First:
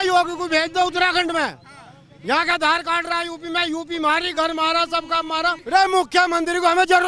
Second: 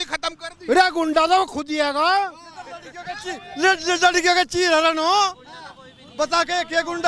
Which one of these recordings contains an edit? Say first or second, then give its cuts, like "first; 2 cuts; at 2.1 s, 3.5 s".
first; 1 cut; at 5.6 s